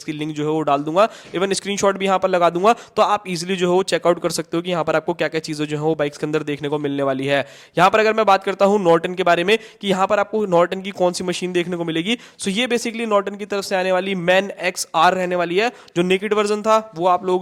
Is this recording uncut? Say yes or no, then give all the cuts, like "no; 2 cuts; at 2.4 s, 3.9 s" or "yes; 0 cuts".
yes; 0 cuts